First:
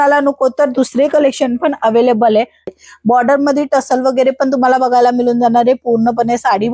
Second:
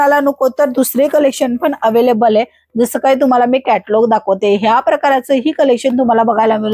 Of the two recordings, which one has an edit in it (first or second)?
first